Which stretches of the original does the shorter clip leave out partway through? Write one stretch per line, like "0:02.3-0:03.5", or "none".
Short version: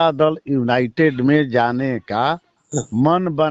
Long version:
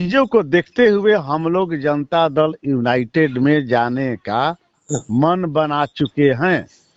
none